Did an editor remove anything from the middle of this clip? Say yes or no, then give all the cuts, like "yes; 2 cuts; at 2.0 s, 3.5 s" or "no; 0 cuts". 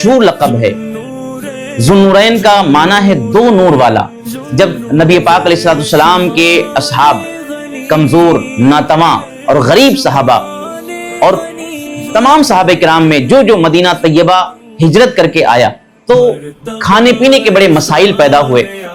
yes; 2 cuts; at 4.4 s, 15.9 s